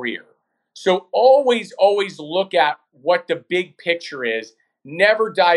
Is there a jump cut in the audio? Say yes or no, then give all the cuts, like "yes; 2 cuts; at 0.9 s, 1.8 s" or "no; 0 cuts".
no; 0 cuts